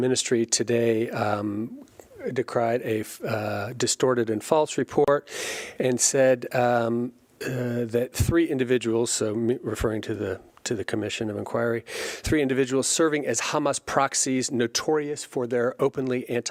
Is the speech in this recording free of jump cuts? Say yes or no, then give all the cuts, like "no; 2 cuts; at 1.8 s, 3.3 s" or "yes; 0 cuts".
yes; 0 cuts